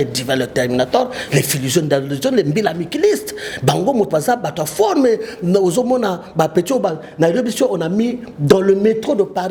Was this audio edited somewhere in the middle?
no; 0 cuts

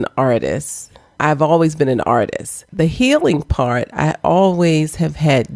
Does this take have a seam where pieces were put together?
yes; 2 cuts; at 1.1 s, 2.7 s

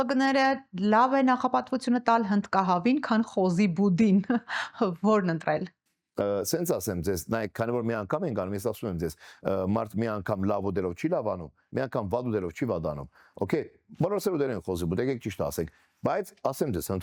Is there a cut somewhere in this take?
no; 0 cuts

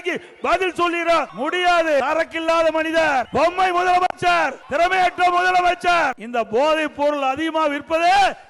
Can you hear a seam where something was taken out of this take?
yes; 5 cuts; at 1.3 s, 2.0 s, 3.3 s, 4.6 s, 6.2 s

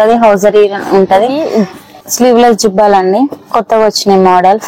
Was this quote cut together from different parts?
yes; 1 cut; at 1.4 s

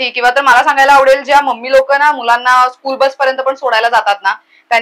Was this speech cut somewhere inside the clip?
no; 0 cuts

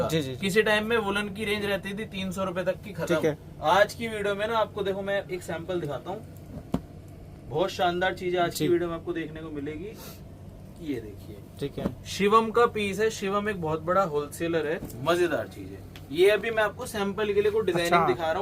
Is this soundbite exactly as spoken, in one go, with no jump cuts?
no; 1 cut; at 14.9 s

